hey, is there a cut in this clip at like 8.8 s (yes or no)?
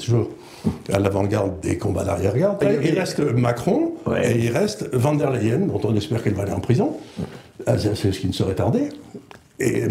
no